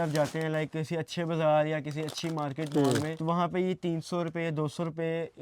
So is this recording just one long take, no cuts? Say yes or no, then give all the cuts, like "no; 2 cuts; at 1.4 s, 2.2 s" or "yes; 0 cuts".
no; 1 cut; at 3.1 s